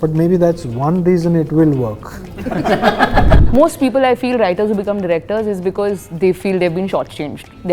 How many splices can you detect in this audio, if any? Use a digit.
1